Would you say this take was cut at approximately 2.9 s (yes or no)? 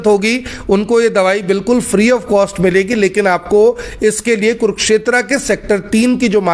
no